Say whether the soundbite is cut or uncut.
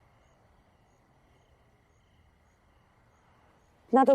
cut